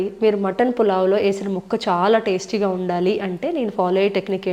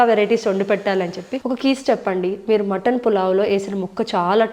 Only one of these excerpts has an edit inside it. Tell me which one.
second; 1 cut; at 1.4 s

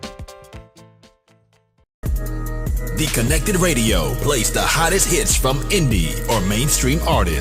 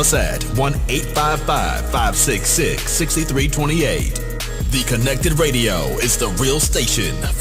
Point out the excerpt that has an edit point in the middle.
first; 1 cut; at 2.0 s

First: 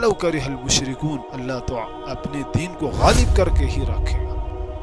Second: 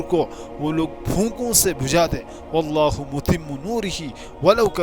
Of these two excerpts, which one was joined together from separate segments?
first; 1 cut; at 1.3 s

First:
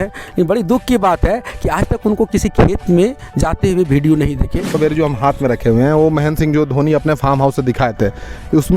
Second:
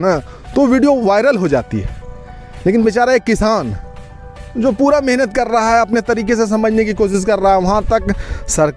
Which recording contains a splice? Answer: first; 1 cut; at 4.8 s

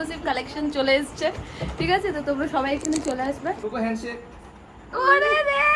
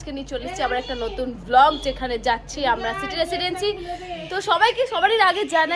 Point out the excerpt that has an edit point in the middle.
first; 1 cut; at 3.6 s

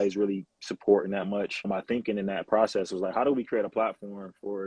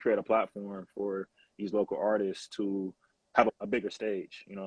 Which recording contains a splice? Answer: first; 1 cut; at 1.6 s

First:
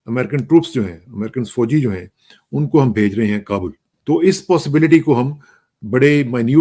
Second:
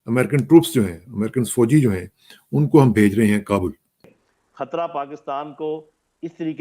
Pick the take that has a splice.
second; 1 cut; at 4.0 s

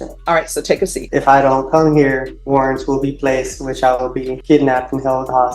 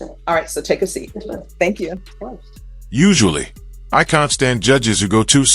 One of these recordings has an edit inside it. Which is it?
first; 3 cuts; at 1.0 s, 2.3 s, 4.3 s

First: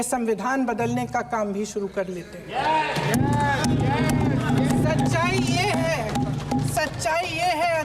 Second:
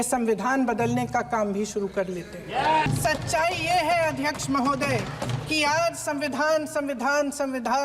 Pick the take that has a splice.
second; 1 cut; at 2.9 s

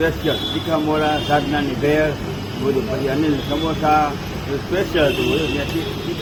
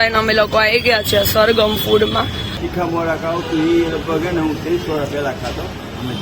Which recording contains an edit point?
second; 1 cut; at 2.6 s

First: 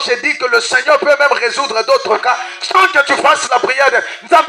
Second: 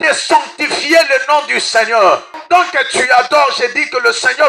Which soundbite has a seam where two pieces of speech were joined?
second; 1 cut; at 2.3 s

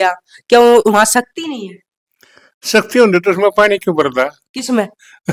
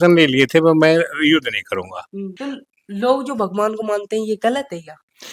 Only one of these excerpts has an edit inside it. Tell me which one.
second; 1 cut; at 2.3 s

